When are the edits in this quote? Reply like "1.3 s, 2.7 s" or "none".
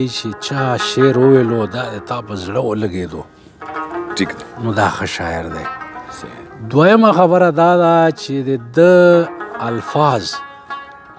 none